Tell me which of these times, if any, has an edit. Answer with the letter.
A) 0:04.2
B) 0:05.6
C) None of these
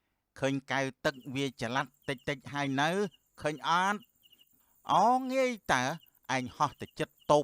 A